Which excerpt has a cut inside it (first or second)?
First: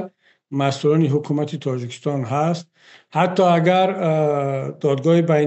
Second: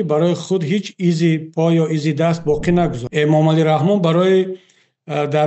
second